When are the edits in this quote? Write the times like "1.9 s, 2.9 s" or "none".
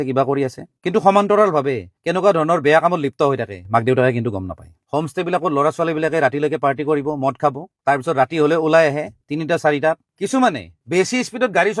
4.7 s, 10.1 s